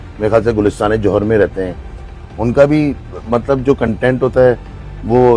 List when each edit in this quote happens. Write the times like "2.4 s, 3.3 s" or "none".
none